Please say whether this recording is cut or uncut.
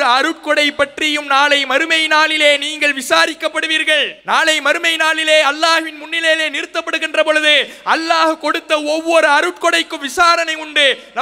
cut